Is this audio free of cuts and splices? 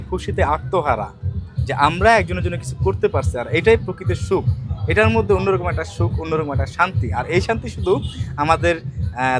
yes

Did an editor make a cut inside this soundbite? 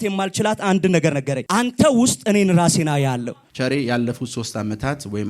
yes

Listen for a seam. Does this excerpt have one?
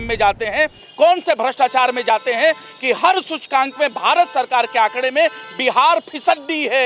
no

